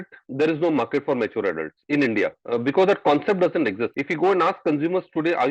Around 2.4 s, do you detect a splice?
yes; 2 cuts; at 2.4 s, 4.0 s

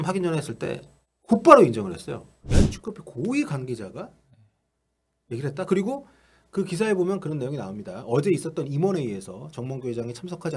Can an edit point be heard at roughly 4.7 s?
no; 1 cut; at 2.5 s

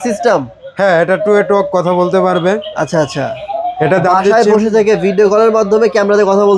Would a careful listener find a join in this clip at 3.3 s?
no; 0 cuts

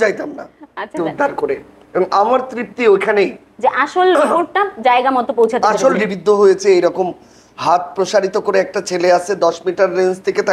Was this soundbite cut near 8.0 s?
no; 2 cuts; at 1.0 s, 6.0 s

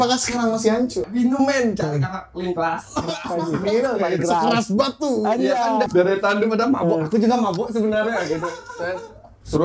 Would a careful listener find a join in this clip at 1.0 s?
yes; 2 cuts; at 1.0 s, 5.9 s

